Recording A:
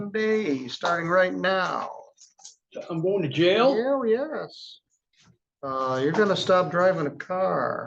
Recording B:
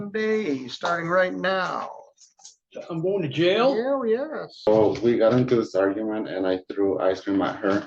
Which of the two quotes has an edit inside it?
B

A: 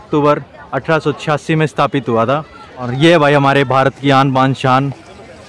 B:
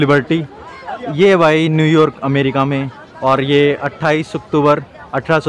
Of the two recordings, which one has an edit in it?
A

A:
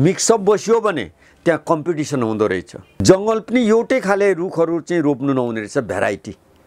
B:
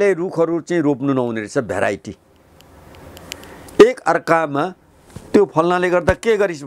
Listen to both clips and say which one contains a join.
A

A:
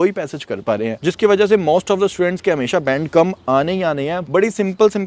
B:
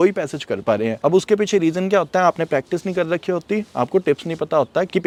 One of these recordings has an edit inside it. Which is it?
A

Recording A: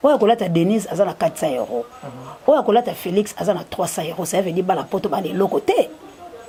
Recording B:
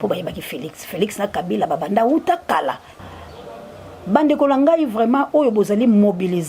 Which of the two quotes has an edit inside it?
B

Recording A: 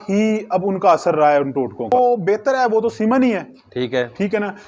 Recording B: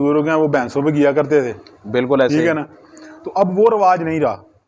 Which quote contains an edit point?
A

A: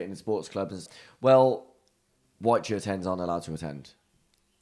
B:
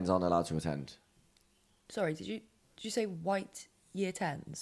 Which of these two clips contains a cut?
A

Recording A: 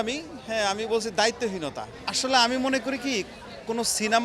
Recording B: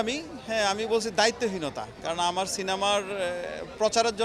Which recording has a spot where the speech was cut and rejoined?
A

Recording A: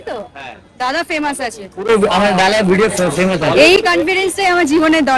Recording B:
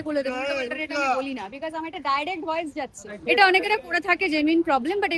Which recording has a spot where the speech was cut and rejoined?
B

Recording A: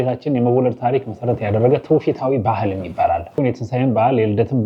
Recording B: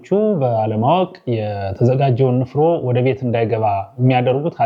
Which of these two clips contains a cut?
A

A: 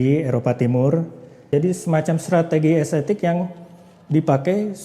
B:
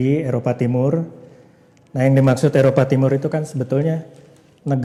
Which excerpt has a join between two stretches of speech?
A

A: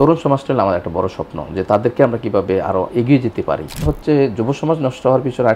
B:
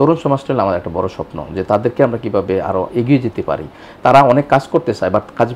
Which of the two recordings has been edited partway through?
A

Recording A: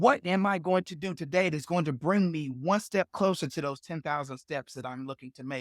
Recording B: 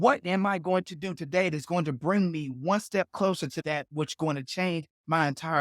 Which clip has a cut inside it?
B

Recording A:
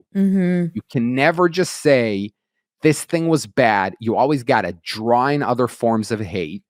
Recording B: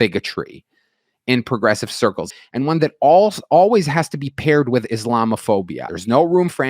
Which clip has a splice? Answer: B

